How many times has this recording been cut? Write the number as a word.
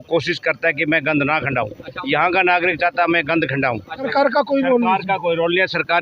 one